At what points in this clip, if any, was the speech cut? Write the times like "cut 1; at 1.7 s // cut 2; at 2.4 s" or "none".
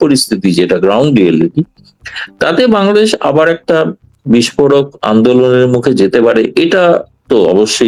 none